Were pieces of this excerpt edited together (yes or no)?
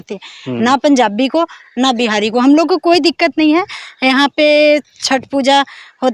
no